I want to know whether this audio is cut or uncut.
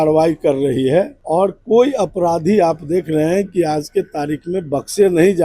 cut